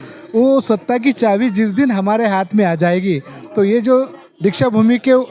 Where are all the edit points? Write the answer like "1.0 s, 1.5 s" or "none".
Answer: none